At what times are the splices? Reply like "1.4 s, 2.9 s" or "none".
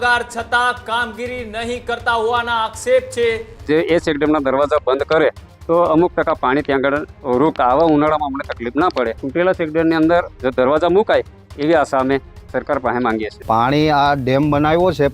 3.7 s, 7.5 s, 9.2 s, 13.3 s